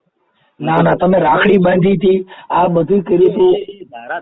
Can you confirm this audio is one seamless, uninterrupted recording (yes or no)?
yes